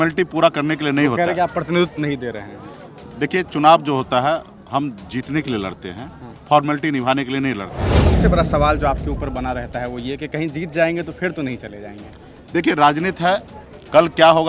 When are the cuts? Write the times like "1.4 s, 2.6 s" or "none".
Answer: 8.1 s